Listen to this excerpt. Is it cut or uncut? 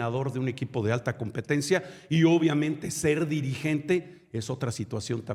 uncut